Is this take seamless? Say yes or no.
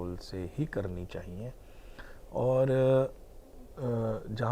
yes